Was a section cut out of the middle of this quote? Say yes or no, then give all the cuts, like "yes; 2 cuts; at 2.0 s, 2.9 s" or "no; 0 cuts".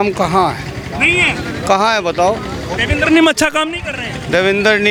no; 0 cuts